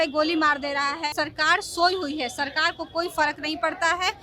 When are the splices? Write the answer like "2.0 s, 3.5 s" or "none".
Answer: 1.1 s